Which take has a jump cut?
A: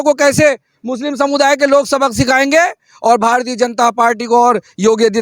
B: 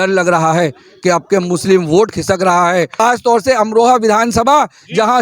B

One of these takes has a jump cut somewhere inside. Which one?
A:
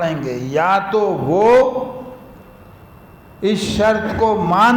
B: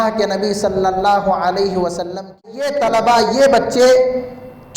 B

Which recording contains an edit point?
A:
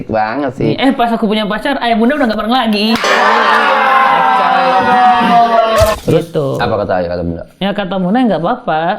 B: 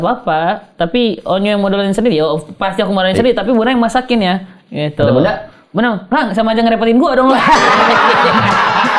A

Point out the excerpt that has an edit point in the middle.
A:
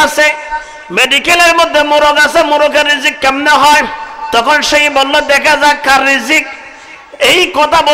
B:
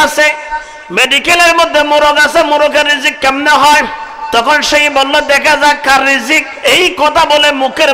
B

